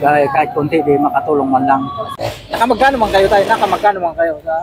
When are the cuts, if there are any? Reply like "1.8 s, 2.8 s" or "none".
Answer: 2.1 s